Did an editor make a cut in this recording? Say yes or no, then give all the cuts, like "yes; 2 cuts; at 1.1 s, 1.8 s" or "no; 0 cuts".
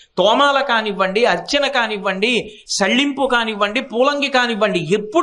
no; 0 cuts